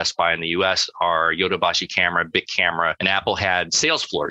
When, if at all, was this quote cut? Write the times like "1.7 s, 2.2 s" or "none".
3.0 s